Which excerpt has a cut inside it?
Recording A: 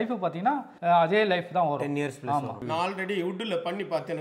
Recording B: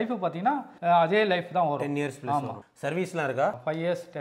A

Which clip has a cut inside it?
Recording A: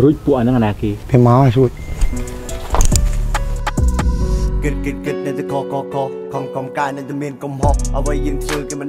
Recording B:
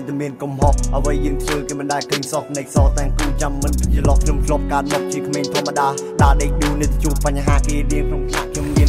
A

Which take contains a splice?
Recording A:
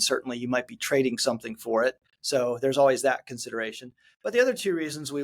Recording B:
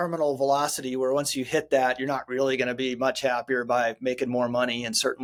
A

